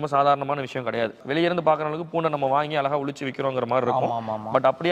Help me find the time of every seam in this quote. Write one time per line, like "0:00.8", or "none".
none